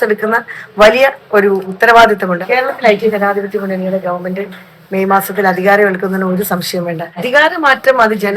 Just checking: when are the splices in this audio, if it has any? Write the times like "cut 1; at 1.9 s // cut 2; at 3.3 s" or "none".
cut 1; at 1.7 s // cut 2; at 2.4 s // cut 3; at 7.2 s